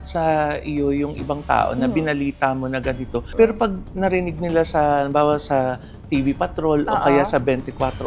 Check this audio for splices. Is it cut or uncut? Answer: uncut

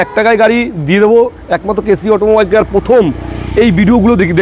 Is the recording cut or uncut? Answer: uncut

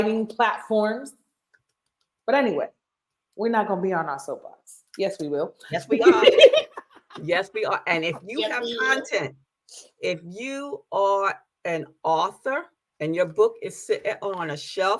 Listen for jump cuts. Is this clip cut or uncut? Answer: uncut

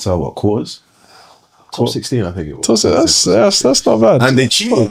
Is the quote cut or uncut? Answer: uncut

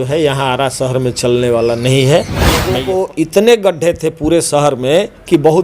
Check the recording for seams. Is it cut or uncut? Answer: cut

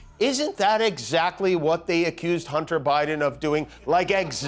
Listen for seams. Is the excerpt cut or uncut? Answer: uncut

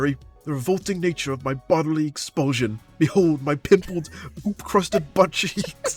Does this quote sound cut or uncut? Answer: uncut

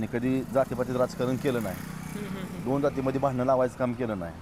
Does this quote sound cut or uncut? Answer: uncut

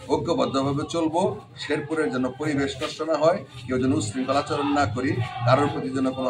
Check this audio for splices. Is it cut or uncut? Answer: uncut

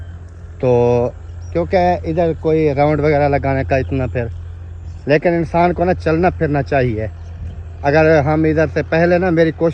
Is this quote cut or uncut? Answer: uncut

